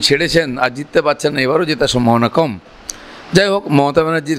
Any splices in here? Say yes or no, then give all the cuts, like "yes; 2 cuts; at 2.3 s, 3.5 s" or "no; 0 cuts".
no; 0 cuts